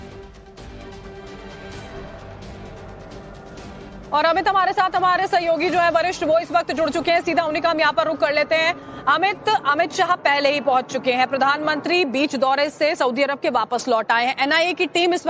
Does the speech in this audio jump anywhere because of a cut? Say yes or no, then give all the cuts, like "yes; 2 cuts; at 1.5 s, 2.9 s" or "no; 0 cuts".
no; 0 cuts